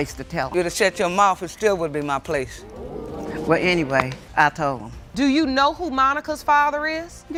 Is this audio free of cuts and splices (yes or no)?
yes